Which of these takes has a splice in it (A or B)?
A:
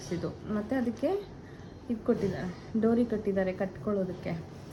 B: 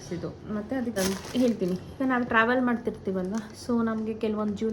B